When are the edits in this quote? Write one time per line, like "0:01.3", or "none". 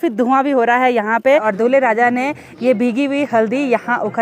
0:01.5